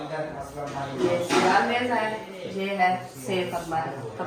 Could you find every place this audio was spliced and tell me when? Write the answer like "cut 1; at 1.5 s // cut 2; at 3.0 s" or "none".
none

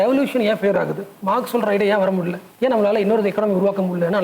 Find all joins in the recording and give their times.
cut 1; at 1.1 s // cut 2; at 2.4 s

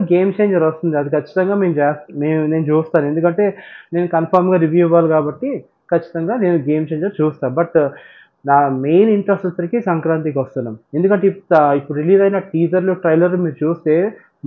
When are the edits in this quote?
none

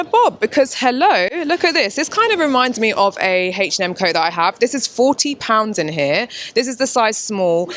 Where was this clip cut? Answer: none

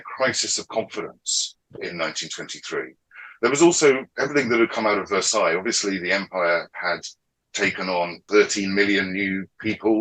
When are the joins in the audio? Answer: cut 1; at 1.7 s // cut 2; at 8.2 s

